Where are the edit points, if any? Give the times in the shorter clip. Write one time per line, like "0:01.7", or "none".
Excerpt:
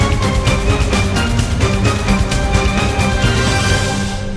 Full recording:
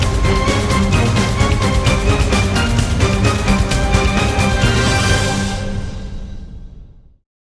none